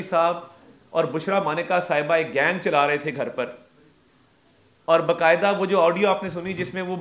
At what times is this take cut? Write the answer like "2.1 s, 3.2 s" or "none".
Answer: none